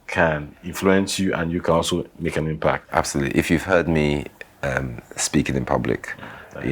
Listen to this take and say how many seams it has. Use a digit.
1